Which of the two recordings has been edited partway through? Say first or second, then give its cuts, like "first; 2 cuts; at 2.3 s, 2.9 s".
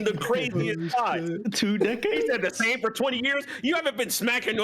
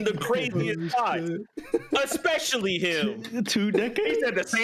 first; 1 cut; at 1.4 s